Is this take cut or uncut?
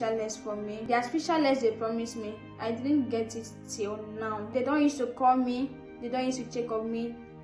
cut